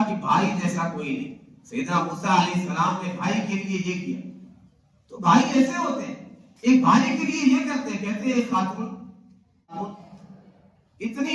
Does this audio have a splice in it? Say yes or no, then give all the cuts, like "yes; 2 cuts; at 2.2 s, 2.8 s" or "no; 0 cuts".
yes; 1 cut; at 9.7 s